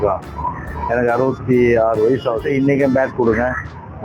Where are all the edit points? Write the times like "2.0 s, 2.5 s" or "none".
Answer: 2.5 s